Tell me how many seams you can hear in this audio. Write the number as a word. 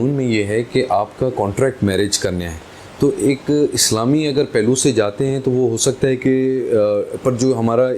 zero